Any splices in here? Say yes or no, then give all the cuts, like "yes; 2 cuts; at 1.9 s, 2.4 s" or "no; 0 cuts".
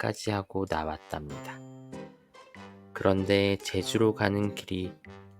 yes; 2 cuts; at 1.3 s, 3.0 s